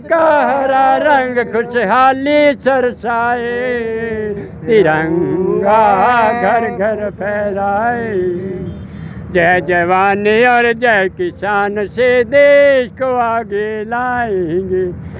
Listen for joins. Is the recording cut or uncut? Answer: uncut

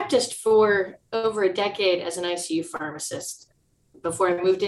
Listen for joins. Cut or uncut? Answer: cut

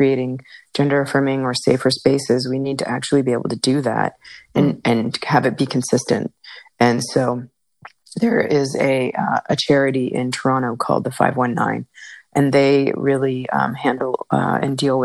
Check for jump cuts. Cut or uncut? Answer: uncut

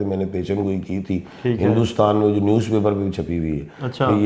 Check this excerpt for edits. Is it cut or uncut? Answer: uncut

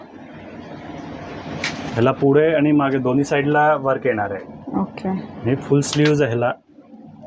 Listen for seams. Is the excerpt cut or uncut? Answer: uncut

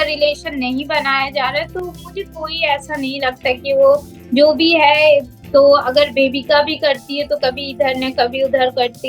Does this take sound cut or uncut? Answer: uncut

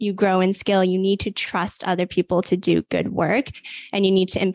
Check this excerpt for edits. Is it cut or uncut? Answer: uncut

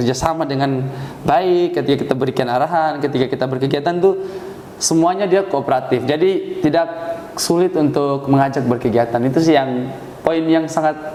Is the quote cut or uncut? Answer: uncut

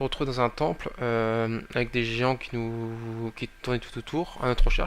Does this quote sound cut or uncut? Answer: cut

